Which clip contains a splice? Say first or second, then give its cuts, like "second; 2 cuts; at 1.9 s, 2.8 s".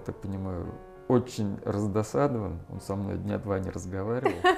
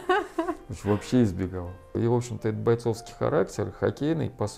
second; 1 cut; at 1.9 s